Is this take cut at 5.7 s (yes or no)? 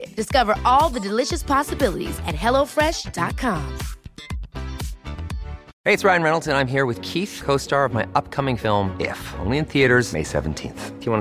yes